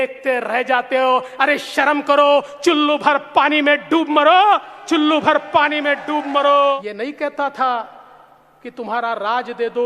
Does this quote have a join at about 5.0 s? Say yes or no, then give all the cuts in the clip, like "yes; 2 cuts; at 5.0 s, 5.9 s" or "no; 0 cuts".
no; 1 cut; at 6.8 s